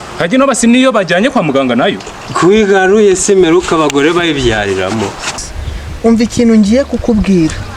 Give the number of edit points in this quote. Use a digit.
1